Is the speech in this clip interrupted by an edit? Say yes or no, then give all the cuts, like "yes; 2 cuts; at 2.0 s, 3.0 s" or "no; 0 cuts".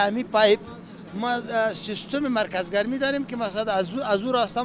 no; 0 cuts